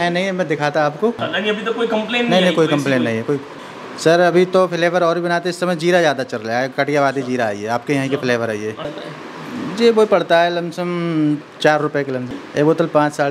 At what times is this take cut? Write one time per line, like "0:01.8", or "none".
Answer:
0:01.2
0:03.5
0:08.9
0:12.3

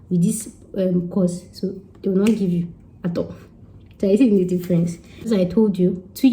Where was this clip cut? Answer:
0:05.3

